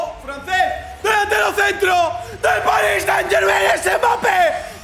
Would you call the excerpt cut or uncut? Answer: uncut